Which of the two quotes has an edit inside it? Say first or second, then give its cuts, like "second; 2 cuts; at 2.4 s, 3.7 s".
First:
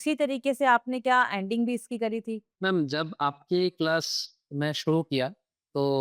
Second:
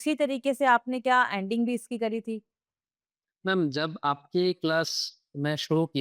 first; 1 cut; at 2.5 s